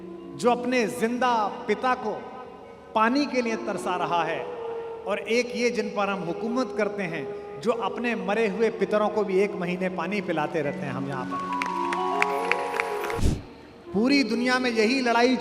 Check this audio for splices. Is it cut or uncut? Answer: cut